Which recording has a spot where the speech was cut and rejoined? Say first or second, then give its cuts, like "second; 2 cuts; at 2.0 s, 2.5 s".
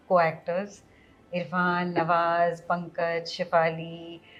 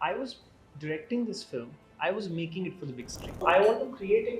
second; 1 cut; at 3.4 s